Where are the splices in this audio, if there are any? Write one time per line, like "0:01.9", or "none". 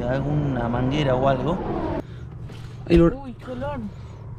0:02.0